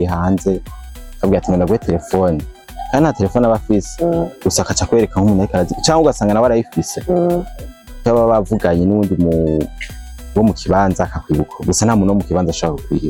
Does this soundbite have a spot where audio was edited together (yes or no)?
no